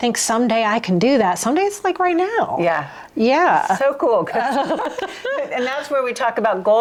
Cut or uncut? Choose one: uncut